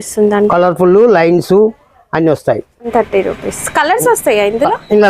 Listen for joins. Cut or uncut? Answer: cut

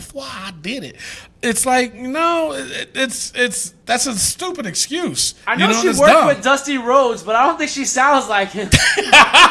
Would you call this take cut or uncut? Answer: cut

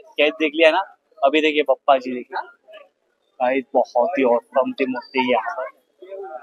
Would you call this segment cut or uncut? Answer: uncut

